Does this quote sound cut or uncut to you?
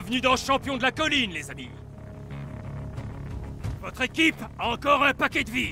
uncut